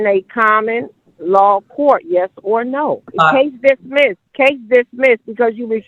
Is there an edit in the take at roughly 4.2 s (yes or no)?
yes